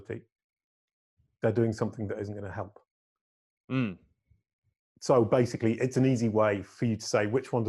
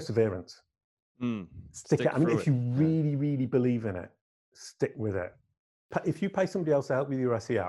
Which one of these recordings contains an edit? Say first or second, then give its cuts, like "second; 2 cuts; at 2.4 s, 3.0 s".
second; 1 cut; at 5.9 s